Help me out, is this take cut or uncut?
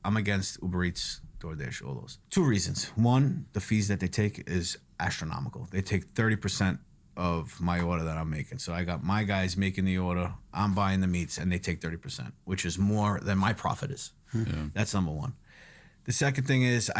cut